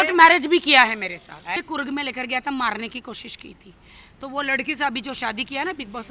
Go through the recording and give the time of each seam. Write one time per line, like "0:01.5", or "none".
0:01.4

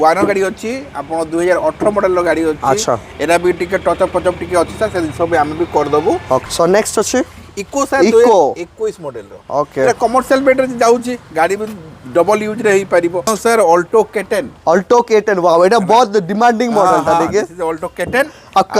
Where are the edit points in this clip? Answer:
0:06.4
0:13.3

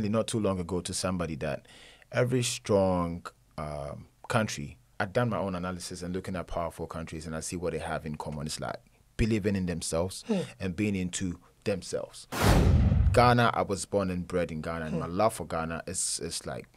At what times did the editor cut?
0:12.7

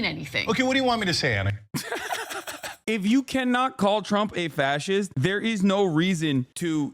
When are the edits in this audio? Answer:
0:02.7
0:05.1

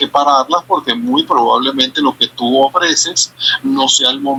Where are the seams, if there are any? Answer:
none

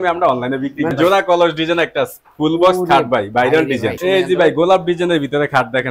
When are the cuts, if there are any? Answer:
0:00.9
0:04.0

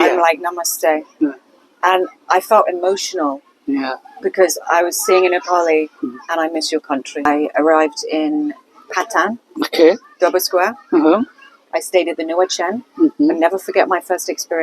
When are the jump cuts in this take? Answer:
0:07.2

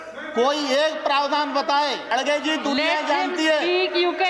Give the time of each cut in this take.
0:02.1

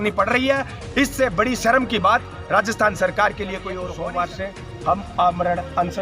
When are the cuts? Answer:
0:03.8

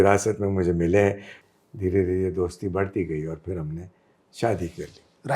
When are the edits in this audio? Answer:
0:01.4

